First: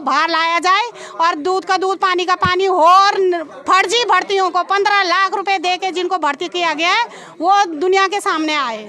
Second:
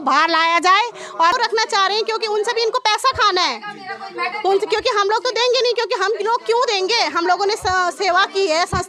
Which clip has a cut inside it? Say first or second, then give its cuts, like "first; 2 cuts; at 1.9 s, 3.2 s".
second; 1 cut; at 1.3 s